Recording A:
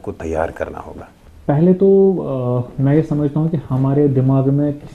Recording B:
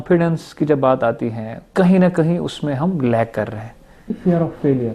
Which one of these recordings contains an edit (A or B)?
B